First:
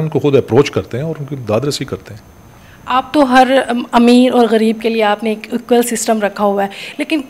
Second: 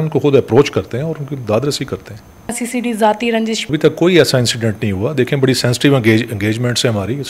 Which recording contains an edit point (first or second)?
second